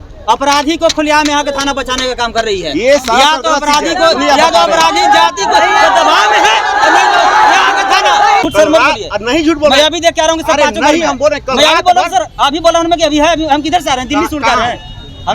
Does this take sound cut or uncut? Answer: cut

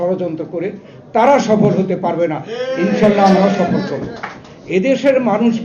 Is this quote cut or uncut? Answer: uncut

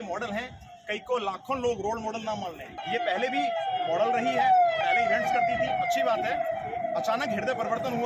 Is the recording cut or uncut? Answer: cut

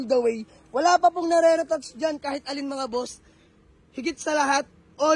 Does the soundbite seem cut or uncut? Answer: uncut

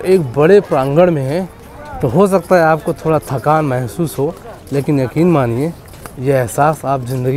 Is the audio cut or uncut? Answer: uncut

